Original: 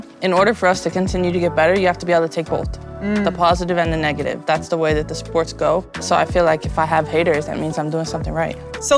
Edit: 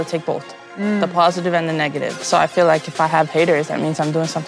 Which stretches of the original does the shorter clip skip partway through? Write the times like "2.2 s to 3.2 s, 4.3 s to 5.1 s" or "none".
4.4 s to 5.9 s